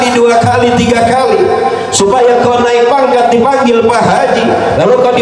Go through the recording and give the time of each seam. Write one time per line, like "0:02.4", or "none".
none